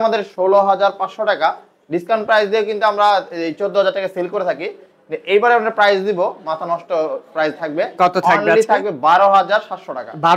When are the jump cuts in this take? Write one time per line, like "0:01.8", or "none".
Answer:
none